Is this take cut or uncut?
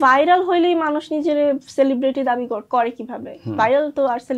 uncut